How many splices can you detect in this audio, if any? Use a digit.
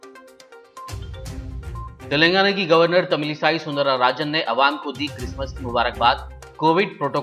1